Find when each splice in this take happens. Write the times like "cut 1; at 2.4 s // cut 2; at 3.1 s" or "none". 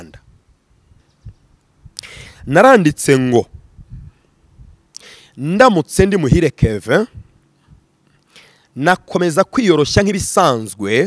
cut 1; at 1.0 s